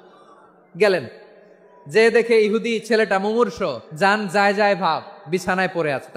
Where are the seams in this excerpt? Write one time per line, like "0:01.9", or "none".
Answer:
0:03.8